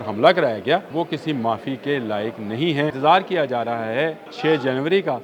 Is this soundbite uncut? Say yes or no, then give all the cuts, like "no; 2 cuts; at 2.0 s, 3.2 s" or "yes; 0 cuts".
no; 3 cuts; at 0.9 s, 3.0 s, 4.3 s